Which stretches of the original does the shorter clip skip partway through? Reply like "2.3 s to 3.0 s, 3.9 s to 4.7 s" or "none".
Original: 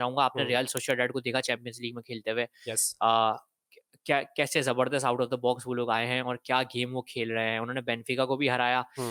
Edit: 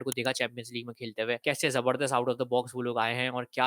2.5 s to 4.3 s